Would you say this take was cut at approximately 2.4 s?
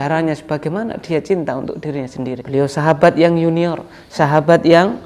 yes; 1 cut; at 2.4 s

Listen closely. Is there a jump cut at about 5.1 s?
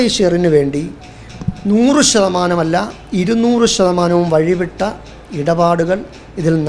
no; 0 cuts

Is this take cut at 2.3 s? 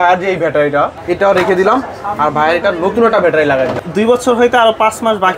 no; 2 cuts; at 1.0 s, 3.8 s

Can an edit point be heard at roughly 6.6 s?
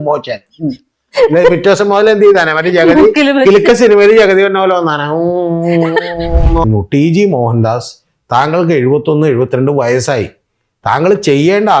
yes; 1 cut; at 6.6 s

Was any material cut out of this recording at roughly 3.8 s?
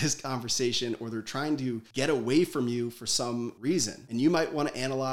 yes; 1 cut; at 3.8 s

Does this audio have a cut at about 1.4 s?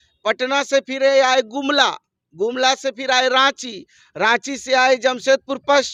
no; 0 cuts

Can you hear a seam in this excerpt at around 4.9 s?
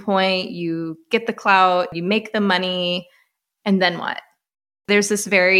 yes; 2 cuts; at 1.9 s, 4.9 s

